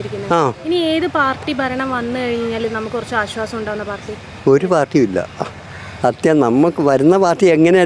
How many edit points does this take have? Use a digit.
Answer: 0